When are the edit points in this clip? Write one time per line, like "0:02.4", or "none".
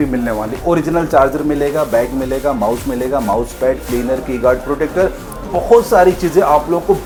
none